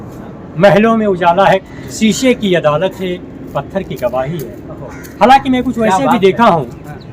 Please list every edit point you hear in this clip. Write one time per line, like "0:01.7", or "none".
0:01.7